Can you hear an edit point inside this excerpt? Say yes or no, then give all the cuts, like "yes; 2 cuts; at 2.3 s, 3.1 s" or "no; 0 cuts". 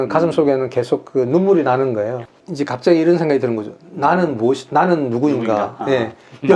yes; 1 cut; at 2.3 s